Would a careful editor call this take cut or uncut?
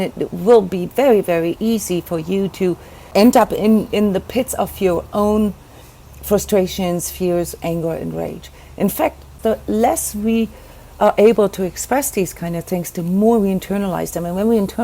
cut